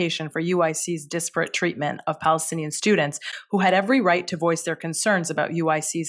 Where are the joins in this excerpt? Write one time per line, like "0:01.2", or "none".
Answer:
none